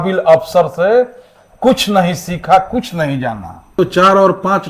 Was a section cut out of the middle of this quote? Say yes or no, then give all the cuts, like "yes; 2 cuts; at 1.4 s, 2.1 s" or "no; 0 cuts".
yes; 1 cut; at 3.8 s